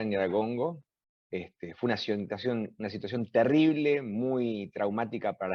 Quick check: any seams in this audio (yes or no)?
no